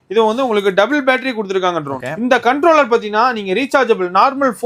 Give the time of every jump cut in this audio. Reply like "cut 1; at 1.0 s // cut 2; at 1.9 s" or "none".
cut 1; at 2.0 s

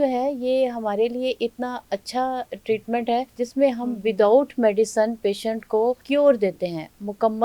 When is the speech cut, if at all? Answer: cut 1; at 3.3 s // cut 2; at 6.0 s

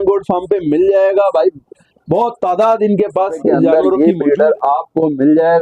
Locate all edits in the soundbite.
cut 1; at 3.8 s

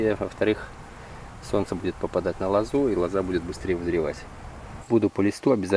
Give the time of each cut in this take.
cut 1; at 4.7 s

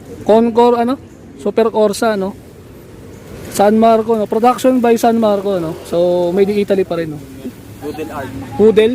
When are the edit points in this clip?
cut 1; at 7.5 s

